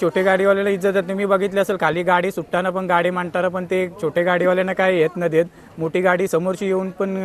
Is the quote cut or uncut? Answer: uncut